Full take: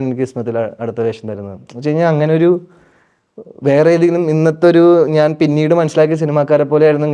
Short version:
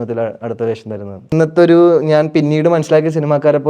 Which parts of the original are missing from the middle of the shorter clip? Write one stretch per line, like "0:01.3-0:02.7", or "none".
0:01.7-0:04.4